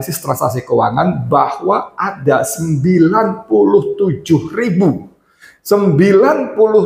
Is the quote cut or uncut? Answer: uncut